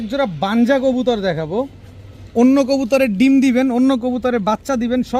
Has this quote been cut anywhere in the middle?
no; 0 cuts

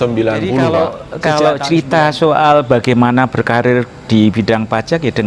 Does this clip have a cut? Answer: yes; 1 cut; at 1.1 s

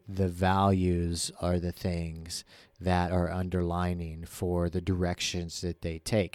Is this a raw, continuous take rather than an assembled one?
yes; 0 cuts

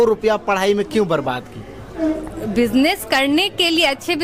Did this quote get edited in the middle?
no; 0 cuts

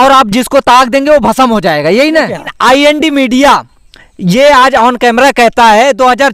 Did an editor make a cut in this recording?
yes; 1 cut; at 2.5 s

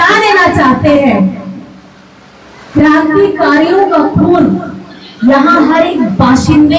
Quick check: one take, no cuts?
yes; 0 cuts

